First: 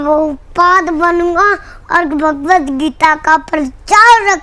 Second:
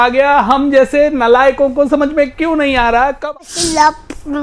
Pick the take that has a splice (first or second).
second